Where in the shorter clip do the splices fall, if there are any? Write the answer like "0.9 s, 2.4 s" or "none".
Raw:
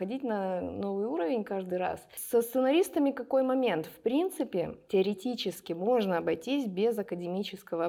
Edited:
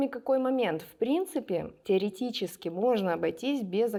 none